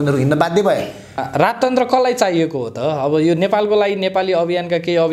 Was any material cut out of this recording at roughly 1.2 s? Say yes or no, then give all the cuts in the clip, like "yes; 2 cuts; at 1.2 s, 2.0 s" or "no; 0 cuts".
yes; 1 cut; at 1.2 s